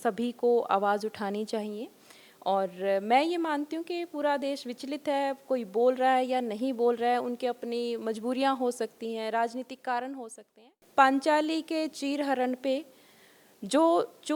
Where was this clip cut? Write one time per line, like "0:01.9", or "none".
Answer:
0:10.8